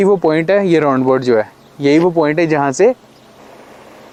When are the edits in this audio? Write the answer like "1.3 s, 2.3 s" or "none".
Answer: none